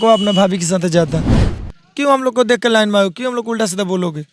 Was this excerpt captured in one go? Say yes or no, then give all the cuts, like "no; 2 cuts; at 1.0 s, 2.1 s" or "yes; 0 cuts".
no; 1 cut; at 1.5 s